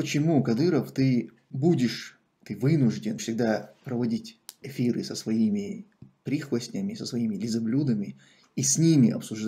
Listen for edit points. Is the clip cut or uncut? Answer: cut